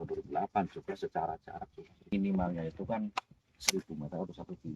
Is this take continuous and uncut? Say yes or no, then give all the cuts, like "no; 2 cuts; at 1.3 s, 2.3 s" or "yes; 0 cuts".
no; 1 cut; at 2.1 s